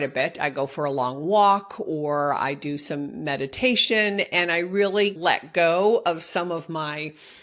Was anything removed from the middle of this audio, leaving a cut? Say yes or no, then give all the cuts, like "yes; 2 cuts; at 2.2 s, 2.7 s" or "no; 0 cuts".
yes; 1 cut; at 5.2 s